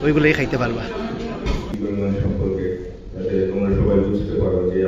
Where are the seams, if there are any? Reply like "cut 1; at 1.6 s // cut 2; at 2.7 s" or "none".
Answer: cut 1; at 1.7 s